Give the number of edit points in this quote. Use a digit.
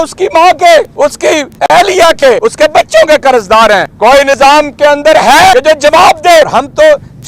5